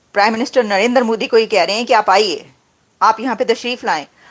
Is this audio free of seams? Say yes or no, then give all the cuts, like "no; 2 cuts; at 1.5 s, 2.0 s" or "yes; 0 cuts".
yes; 0 cuts